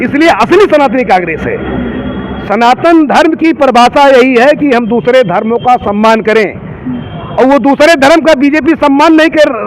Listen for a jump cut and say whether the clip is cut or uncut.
uncut